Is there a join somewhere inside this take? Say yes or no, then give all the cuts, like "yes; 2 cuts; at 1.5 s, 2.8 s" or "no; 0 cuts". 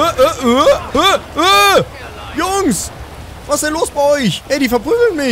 yes; 2 cuts; at 0.8 s, 4.4 s